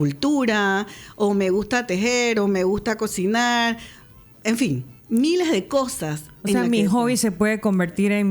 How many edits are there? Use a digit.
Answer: 0